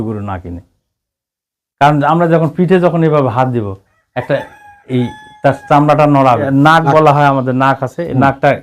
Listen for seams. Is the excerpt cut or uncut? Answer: cut